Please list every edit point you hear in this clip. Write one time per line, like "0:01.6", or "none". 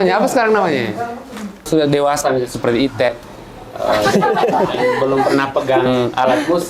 0:01.7